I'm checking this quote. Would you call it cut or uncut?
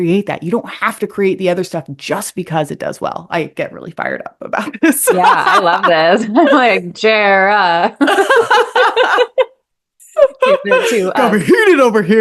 uncut